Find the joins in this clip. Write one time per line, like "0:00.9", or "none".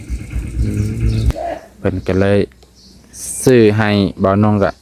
0:01.3